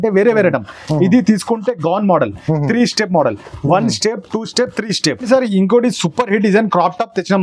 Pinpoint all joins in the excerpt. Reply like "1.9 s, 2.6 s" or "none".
5.2 s

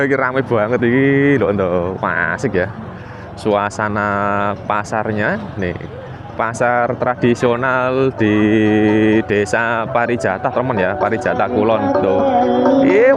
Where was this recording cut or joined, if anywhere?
none

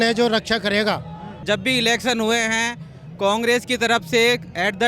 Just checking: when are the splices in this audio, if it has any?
1.3 s

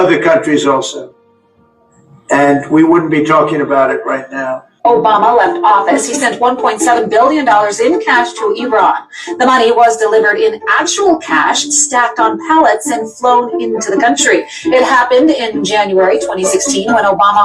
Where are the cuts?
4.7 s

